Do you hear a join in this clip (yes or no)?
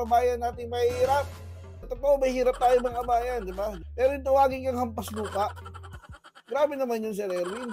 yes